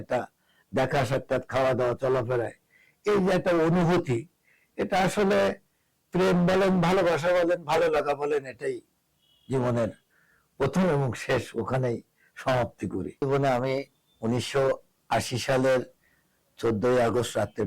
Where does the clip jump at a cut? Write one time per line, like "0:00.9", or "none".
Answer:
0:13.2